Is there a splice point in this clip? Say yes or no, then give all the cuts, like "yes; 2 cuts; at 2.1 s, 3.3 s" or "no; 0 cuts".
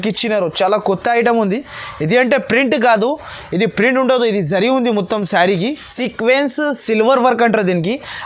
yes; 1 cut; at 5.9 s